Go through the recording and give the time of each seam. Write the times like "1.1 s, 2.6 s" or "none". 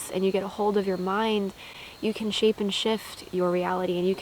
none